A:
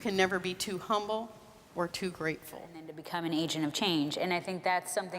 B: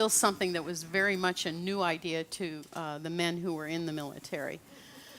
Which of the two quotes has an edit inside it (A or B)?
A